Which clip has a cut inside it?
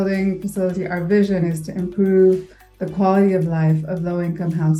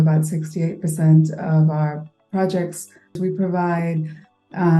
second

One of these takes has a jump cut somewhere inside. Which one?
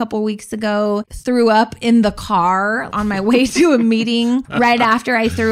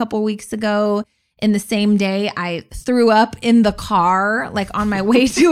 first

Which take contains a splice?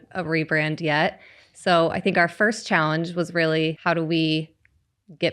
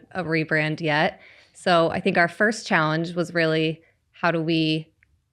first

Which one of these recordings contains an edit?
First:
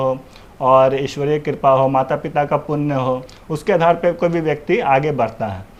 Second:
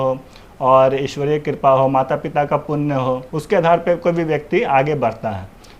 second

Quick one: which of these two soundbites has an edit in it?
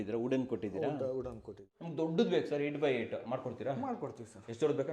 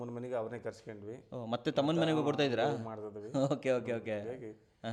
first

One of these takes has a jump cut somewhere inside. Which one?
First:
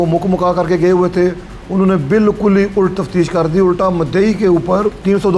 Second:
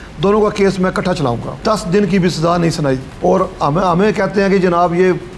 second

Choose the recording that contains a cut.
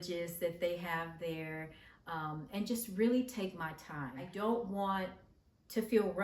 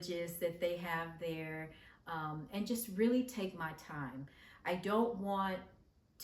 first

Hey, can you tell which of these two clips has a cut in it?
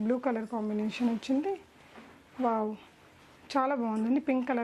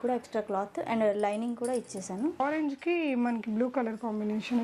second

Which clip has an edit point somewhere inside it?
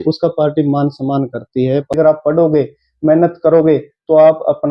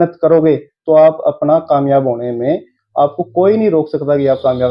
first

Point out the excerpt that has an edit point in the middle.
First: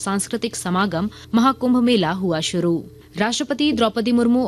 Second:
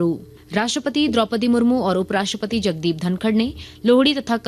first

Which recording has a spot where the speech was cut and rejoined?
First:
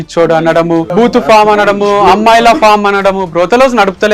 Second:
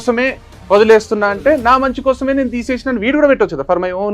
first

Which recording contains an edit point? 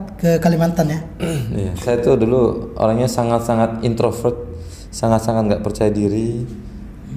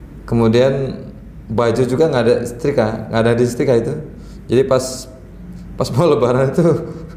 first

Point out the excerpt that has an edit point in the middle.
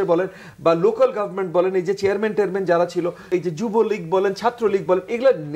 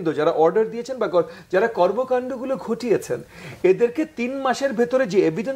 first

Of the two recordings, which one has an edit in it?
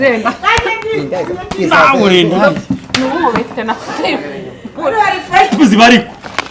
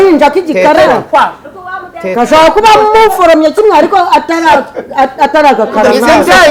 first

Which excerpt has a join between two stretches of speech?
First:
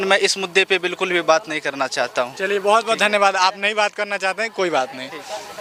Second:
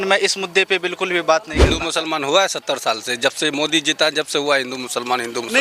second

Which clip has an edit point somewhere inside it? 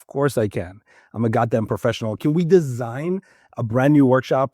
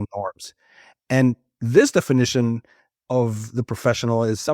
first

